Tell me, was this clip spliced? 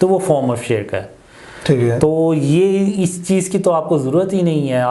no; 0 cuts

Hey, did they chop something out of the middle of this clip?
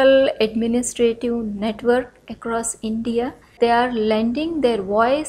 yes; 1 cut; at 3.5 s

